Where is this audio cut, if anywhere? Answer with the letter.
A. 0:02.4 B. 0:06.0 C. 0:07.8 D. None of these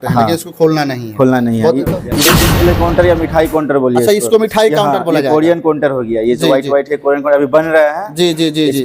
A